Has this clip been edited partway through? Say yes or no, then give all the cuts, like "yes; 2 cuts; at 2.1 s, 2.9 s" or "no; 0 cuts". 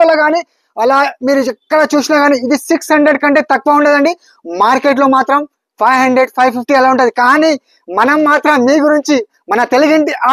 no; 0 cuts